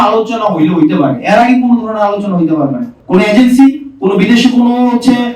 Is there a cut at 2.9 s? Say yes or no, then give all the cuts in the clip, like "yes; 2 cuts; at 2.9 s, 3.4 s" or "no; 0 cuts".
yes; 1 cut; at 2.9 s